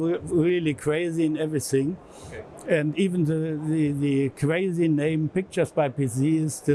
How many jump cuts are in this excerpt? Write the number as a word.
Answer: zero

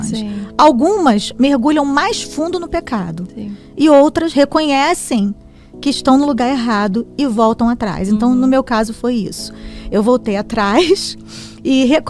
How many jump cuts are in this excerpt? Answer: zero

